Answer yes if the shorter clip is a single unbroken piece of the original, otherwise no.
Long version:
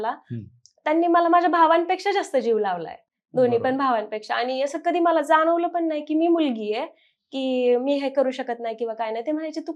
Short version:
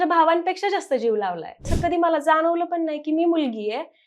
no